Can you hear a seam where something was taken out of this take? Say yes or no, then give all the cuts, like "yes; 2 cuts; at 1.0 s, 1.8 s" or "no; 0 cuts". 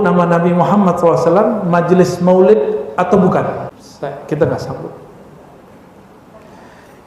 yes; 1 cut; at 3.8 s